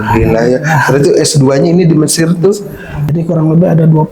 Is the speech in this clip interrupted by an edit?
yes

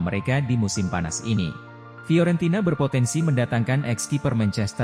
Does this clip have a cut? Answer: yes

